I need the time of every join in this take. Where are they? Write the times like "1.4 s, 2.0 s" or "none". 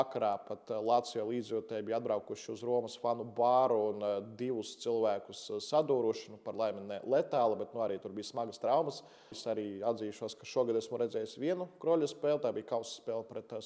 9.4 s

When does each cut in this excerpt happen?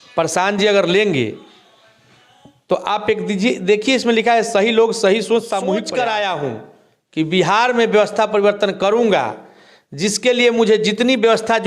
5.8 s

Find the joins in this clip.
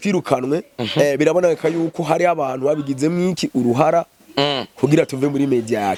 none

